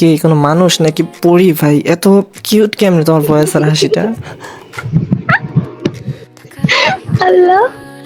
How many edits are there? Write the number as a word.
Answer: one